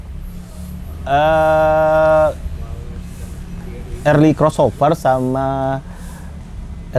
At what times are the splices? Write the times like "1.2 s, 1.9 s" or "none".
none